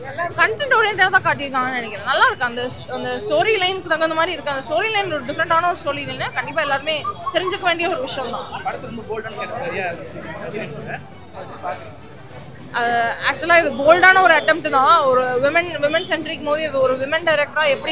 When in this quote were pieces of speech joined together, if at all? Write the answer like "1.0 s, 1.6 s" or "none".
none